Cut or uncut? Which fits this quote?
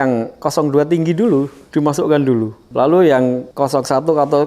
cut